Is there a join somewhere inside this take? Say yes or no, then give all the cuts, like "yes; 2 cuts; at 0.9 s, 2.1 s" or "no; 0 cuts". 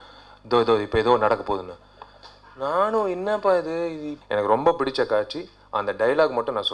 yes; 1 cut; at 4.1 s